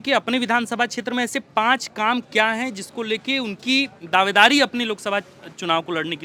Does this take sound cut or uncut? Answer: uncut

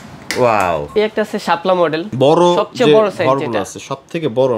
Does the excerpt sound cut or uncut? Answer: cut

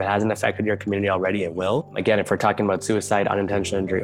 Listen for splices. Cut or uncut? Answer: cut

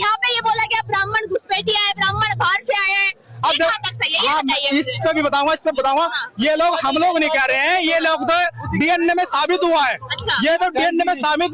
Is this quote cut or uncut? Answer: uncut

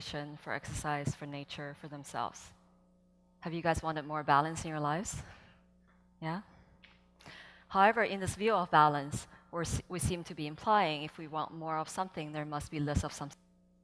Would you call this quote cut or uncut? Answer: cut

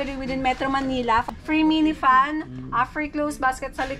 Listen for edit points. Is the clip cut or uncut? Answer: cut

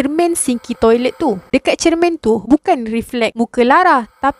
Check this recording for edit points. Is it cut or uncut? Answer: cut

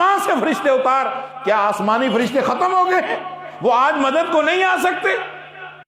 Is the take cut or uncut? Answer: uncut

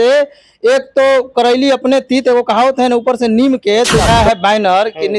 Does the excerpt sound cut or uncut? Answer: cut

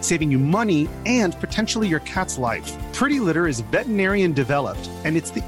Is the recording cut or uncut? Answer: uncut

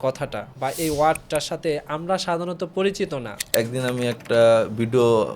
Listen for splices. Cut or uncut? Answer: cut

